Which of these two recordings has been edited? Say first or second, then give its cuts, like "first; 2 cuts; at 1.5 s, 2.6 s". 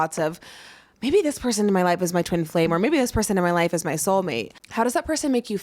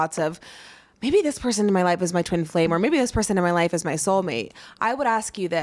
first; 1 cut; at 4.5 s